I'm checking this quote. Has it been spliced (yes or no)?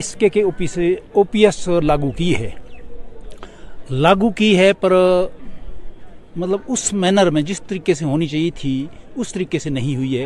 no